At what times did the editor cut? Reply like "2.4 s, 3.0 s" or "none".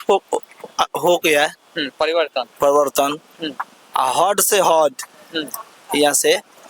none